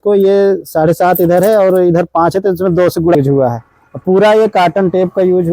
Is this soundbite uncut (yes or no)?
no